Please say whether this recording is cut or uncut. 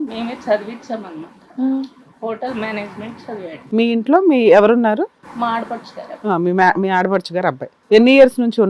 cut